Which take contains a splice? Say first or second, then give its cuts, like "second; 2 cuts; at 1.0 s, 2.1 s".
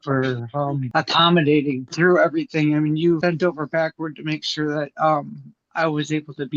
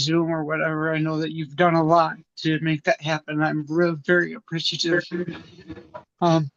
first; 3 cuts; at 0.8 s, 1.9 s, 3.2 s